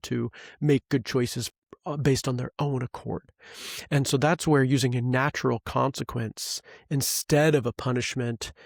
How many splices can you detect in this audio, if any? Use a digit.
0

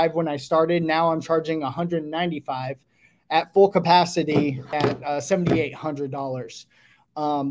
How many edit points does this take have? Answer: 1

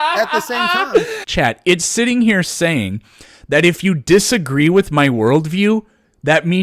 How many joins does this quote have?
1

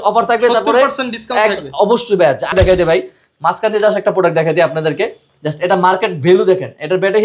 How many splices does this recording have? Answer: 1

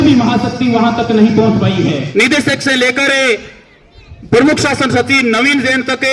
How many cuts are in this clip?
1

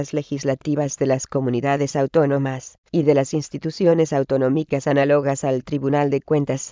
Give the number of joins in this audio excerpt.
1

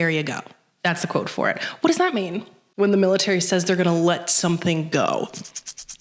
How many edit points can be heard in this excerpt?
1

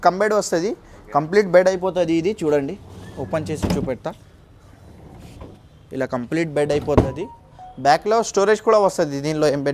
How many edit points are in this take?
0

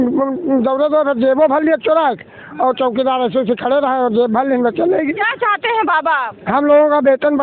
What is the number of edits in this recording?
0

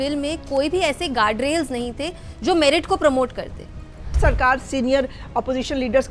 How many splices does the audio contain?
1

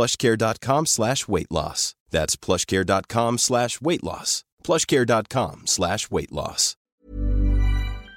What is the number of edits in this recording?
1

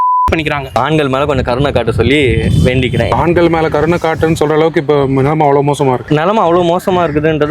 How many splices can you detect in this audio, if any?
3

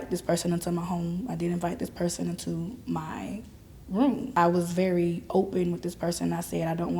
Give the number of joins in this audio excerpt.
1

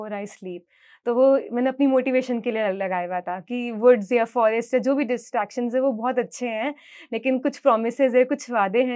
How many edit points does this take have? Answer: 0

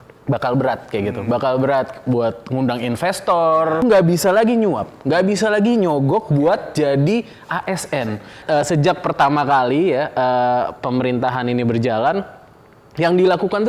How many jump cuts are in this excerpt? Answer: 2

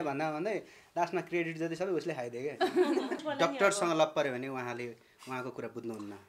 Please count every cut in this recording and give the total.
1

